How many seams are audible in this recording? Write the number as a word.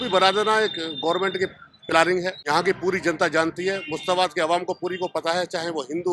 one